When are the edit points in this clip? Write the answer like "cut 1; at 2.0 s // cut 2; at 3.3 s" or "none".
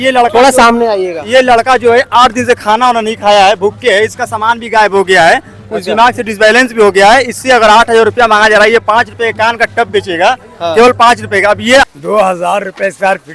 cut 1; at 11.8 s